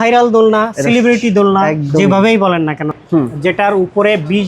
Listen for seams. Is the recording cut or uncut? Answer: cut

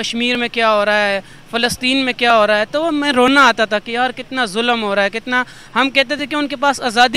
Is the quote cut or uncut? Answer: uncut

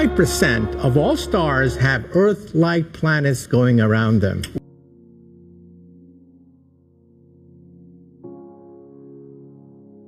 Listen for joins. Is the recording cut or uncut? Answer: cut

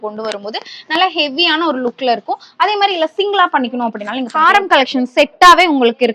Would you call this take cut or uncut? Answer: cut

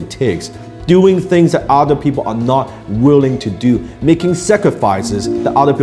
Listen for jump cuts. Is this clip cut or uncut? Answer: uncut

